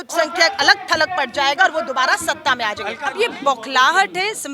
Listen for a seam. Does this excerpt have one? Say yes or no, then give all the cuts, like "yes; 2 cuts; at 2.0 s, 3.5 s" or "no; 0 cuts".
yes; 1 cut; at 3.0 s